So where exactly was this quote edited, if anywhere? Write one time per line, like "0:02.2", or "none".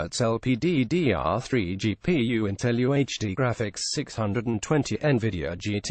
0:01.5
0:05.0